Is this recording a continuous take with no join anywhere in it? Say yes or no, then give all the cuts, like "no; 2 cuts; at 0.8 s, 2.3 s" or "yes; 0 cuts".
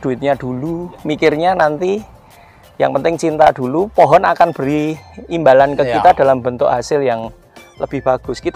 yes; 0 cuts